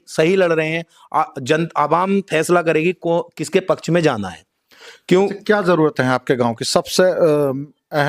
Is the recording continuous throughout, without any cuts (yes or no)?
yes